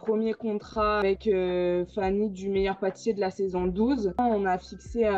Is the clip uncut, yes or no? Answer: no